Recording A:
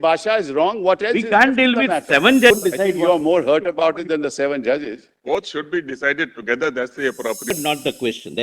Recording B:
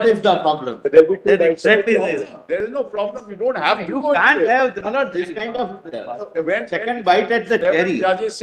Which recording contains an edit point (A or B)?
A